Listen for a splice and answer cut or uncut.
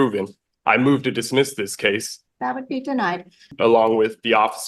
cut